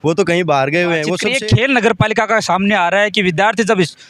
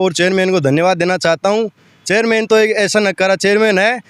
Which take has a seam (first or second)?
first